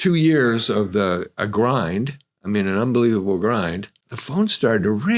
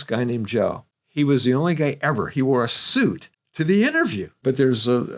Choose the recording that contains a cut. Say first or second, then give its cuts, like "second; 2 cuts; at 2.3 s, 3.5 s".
second; 2 cuts; at 0.9 s, 4.4 s